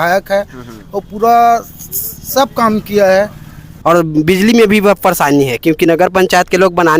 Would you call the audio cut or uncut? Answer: cut